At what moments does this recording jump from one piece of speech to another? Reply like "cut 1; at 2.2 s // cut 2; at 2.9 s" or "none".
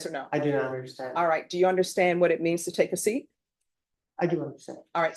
none